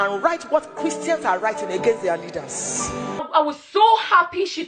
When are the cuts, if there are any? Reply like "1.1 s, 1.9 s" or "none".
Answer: 3.2 s